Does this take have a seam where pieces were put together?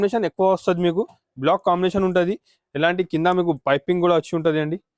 no; 0 cuts

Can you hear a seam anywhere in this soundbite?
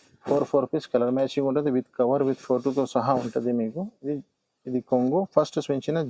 no; 0 cuts

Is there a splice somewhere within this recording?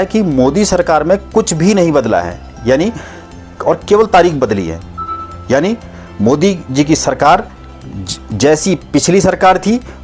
no; 0 cuts

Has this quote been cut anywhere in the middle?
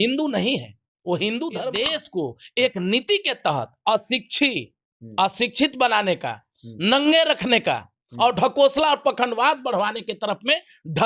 yes; 1 cut; at 1.8 s

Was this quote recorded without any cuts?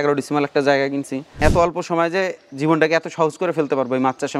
no; 1 cut; at 1.4 s

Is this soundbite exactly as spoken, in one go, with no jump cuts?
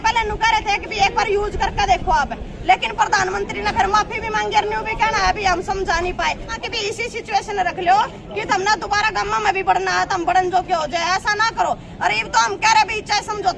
no; 1 cut; at 6.6 s

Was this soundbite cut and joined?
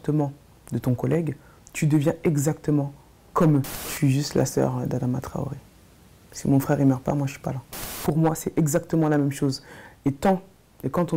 yes; 2 cuts; at 3.9 s, 7.9 s

